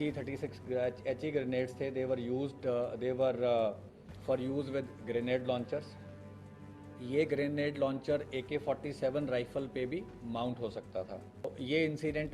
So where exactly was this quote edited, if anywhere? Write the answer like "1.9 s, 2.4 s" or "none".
11.4 s